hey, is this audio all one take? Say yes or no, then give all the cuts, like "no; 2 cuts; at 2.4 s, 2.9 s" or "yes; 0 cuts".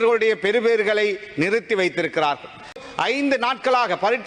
no; 1 cut; at 2.8 s